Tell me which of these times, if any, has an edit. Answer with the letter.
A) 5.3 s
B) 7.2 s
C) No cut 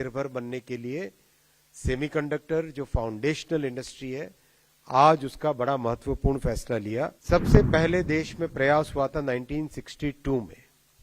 B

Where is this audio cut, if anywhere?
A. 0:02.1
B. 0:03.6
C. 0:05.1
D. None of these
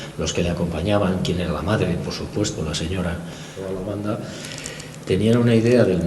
B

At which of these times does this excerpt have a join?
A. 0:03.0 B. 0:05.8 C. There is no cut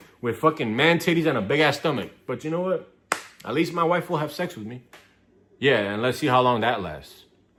C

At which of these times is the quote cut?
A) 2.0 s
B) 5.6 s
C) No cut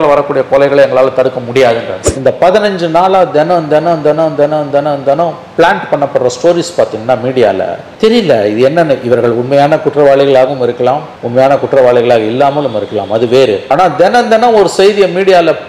A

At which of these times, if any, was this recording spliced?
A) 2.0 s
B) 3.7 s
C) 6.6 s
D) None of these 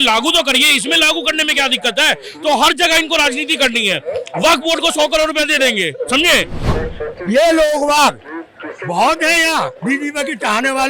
C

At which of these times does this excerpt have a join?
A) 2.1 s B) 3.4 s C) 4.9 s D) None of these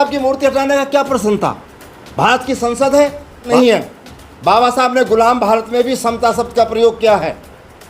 B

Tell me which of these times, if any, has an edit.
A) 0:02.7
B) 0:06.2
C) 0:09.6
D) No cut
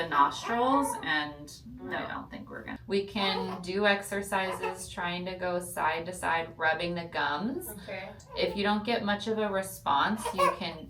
A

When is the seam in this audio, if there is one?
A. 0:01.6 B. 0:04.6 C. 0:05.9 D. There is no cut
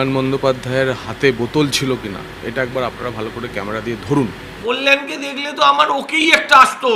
B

